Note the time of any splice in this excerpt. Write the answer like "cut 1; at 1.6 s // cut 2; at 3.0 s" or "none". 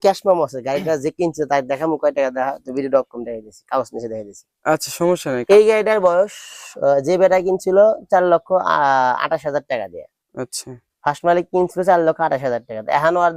cut 1; at 5.4 s